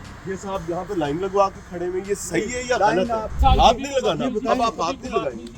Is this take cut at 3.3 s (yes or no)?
yes